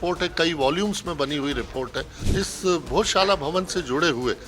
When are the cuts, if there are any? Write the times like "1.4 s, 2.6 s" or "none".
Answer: 2.2 s